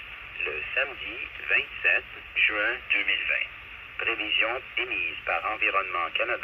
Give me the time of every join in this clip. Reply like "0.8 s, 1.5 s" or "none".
3.5 s

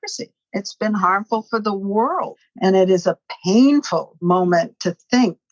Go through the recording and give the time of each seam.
2.4 s, 4.2 s

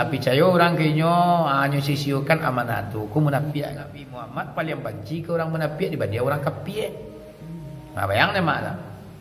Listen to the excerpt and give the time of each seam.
4.2 s

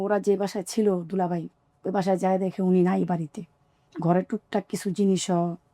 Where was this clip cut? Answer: 3.9 s

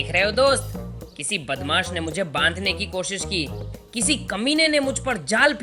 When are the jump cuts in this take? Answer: none

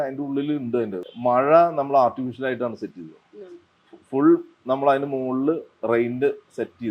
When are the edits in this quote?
1.0 s

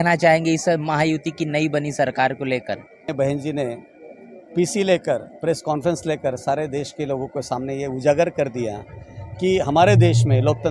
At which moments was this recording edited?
3.1 s

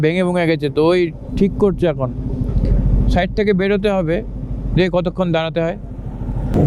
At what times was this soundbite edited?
none

